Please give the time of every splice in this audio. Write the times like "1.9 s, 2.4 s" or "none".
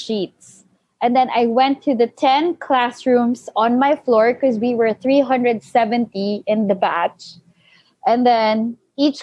none